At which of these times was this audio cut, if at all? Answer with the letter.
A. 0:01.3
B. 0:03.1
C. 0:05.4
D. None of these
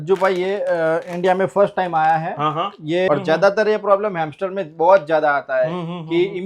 B